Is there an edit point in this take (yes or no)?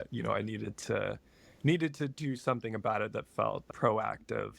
yes